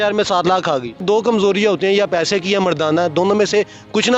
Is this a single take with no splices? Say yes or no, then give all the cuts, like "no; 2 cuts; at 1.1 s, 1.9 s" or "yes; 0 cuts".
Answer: no; 1 cut; at 1.0 s